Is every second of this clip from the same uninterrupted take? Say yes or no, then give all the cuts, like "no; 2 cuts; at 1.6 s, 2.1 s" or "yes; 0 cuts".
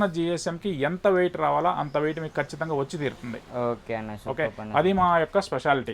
yes; 0 cuts